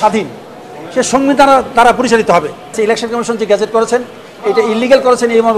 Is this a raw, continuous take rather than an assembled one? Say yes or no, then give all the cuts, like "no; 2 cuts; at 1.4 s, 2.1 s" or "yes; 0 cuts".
no; 1 cut; at 2.8 s